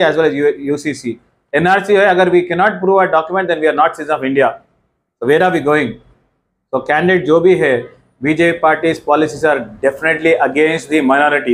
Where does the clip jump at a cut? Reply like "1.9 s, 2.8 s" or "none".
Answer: none